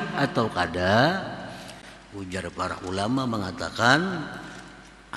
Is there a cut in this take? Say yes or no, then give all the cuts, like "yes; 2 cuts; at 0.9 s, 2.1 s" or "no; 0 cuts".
no; 0 cuts